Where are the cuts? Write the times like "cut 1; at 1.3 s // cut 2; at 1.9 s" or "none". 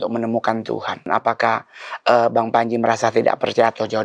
cut 1; at 1.1 s